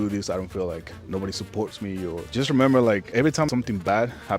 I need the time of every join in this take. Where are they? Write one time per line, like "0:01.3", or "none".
0:02.3
0:03.4